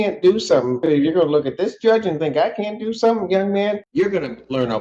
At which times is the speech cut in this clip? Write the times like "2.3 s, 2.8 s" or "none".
0.8 s, 3.8 s